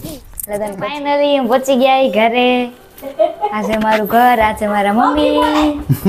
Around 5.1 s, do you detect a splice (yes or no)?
no